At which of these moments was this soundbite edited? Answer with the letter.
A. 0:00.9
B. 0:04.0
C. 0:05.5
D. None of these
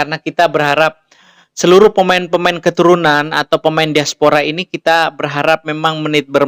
D